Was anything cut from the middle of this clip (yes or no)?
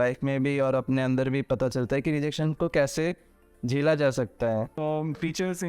yes